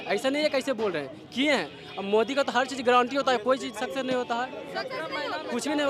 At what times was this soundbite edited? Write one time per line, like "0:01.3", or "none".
none